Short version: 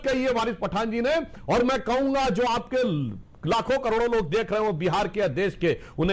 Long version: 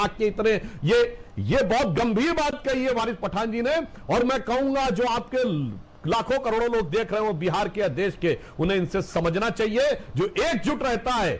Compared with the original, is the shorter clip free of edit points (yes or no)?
yes